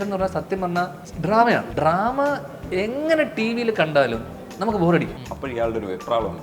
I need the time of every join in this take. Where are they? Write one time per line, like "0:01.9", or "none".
0:01.0
0:01.7
0:05.2

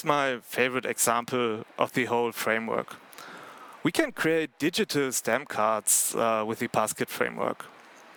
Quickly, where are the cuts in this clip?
none

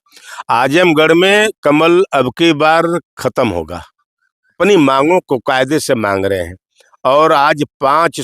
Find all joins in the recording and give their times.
0:04.6

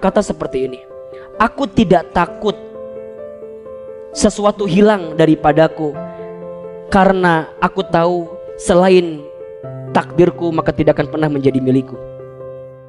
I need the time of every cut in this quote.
0:02.6
0:04.0

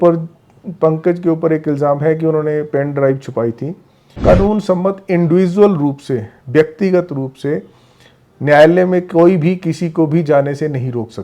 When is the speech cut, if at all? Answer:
0:04.2

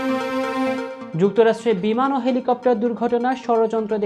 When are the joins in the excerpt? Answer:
none

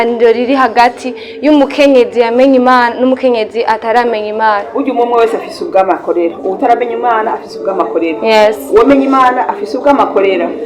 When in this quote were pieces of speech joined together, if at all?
0:04.7

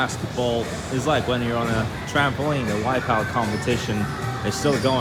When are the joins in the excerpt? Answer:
none

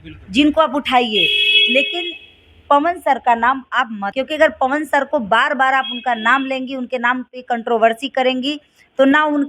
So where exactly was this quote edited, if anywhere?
0:04.1

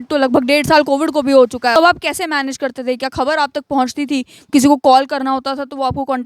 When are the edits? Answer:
0:01.8

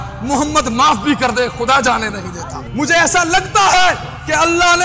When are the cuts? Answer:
0:02.6

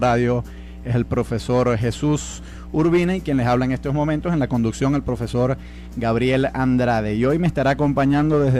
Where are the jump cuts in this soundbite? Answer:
0:07.3

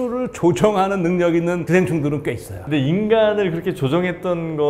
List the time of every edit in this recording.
0:02.6

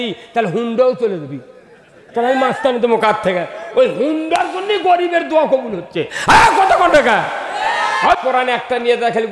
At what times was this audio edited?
0:08.2

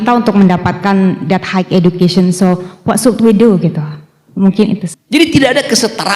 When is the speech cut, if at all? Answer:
0:04.9

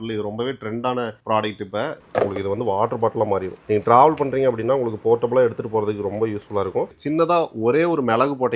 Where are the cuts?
0:02.0
0:07.0

